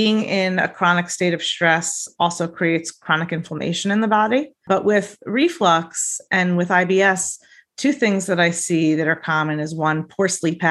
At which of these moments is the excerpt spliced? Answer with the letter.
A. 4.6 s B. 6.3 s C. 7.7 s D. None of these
A